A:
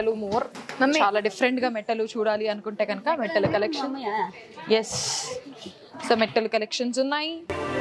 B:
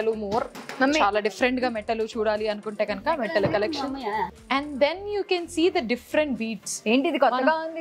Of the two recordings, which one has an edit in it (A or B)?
B